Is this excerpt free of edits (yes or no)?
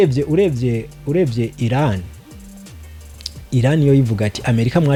yes